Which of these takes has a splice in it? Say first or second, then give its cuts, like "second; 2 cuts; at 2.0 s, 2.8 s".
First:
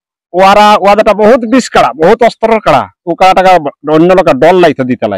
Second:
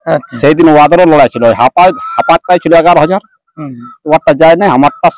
first; 1 cut; at 3.0 s